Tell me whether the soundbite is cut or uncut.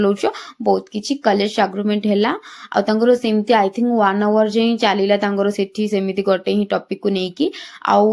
uncut